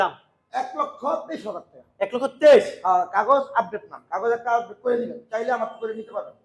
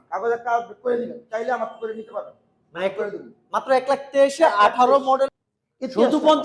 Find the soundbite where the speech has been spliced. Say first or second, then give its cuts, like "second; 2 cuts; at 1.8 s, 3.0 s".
second; 1 cut; at 5.3 s